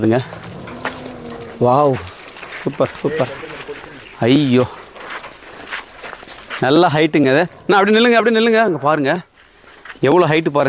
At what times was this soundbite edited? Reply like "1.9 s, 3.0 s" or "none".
none